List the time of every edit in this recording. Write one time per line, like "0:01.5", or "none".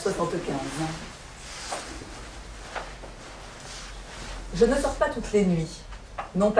0:02.1